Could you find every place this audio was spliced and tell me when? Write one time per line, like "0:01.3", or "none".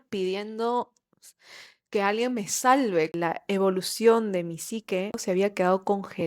0:03.1
0:05.2